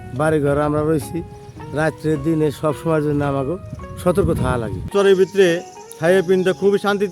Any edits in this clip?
yes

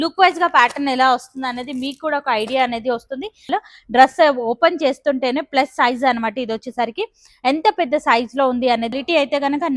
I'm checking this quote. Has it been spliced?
yes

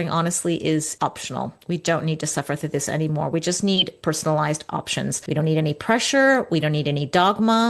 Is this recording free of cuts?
no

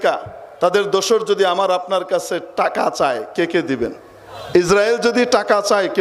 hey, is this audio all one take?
no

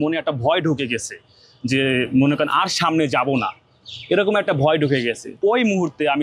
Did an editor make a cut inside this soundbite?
no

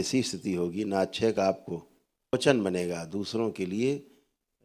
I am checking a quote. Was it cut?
yes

